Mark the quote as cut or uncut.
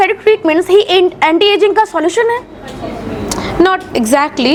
uncut